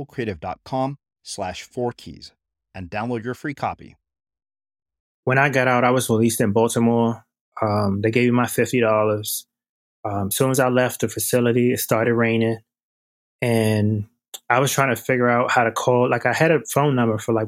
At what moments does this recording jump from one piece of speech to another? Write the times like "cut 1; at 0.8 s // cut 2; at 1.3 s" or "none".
cut 1; at 5.2 s